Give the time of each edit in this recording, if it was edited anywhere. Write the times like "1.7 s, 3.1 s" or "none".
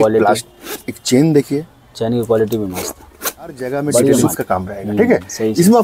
4.3 s